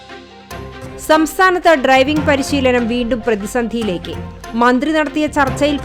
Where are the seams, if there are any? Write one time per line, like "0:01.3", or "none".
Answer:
none